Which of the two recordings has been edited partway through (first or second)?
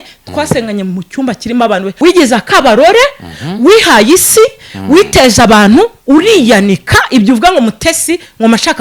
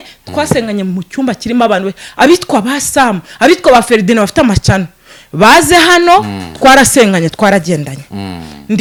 first